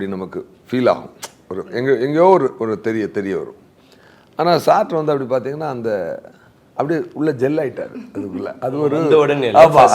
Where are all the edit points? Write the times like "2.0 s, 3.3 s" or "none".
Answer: none